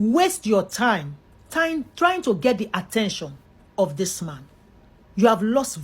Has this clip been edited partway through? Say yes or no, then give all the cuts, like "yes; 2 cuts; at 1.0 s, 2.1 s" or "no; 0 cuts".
yes; 1 cut; at 4.9 s